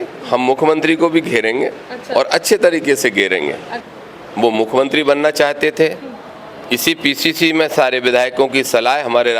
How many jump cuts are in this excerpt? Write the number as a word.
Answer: one